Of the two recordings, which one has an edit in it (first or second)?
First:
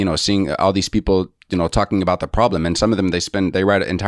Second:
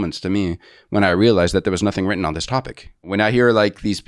second